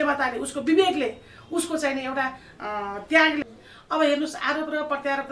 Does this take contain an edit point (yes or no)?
yes